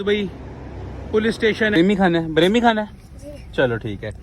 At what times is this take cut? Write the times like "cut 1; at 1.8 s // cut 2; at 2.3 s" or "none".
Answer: cut 1; at 1.8 s